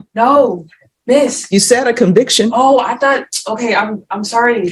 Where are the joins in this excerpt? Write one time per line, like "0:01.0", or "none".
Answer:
none